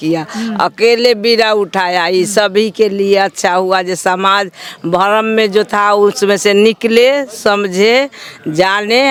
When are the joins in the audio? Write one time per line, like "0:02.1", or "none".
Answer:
none